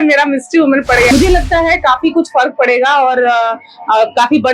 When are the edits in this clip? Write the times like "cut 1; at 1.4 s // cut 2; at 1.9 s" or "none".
cut 1; at 1.1 s